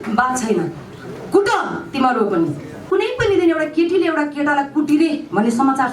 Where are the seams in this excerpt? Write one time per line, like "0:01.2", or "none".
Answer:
0:02.8